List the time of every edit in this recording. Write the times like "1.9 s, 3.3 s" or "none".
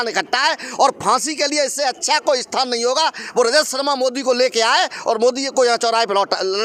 none